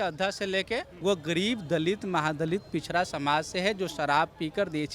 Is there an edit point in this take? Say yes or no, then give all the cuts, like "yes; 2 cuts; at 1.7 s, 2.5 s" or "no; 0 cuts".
yes; 1 cut; at 0.9 s